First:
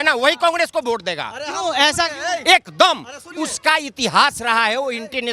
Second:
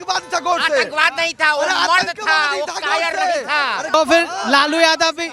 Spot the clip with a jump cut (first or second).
second